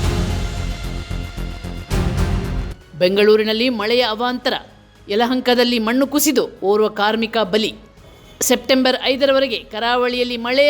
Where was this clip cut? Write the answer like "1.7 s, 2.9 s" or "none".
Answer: 2.8 s